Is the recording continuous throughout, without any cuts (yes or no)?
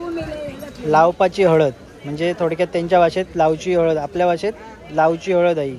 yes